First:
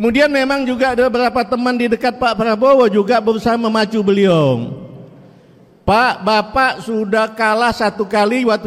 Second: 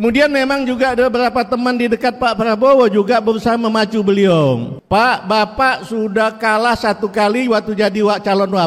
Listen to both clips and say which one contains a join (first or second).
second